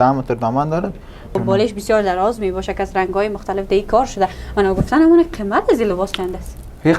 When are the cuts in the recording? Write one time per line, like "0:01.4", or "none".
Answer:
0:01.4

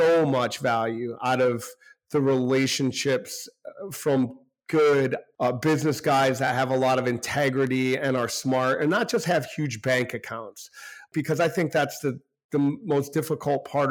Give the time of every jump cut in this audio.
none

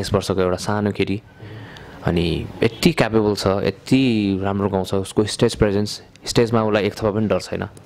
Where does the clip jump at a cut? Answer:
none

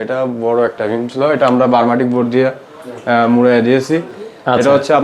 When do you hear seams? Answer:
none

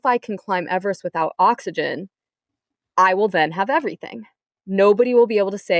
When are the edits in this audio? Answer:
none

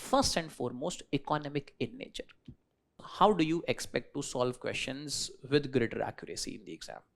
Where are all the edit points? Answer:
0:03.0

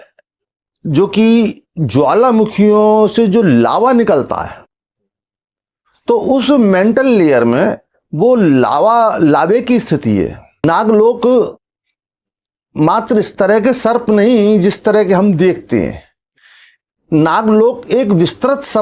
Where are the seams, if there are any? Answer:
0:10.6

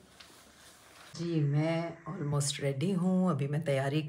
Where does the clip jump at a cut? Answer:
0:01.2

